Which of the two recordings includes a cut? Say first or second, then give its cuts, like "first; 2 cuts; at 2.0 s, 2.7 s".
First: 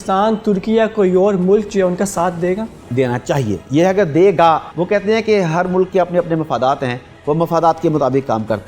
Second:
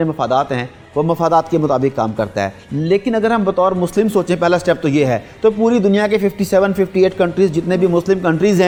first; 3 cuts; at 2.8 s, 3.6 s, 4.7 s